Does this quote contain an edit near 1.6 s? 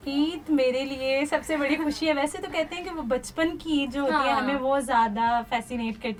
no; 0 cuts

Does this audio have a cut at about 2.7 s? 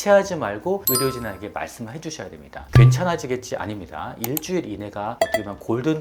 yes; 1 cut; at 2.7 s

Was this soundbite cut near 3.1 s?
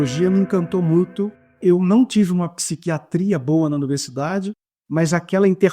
no; 1 cut; at 1.6 s

